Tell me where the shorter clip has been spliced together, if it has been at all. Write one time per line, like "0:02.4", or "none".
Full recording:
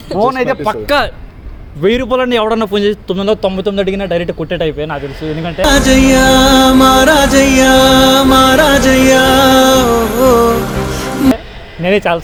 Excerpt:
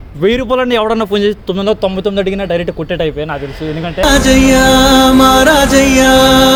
none